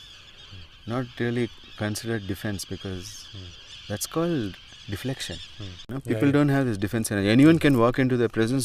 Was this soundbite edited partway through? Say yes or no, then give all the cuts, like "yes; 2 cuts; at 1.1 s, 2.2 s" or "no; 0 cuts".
yes; 1 cut; at 5.9 s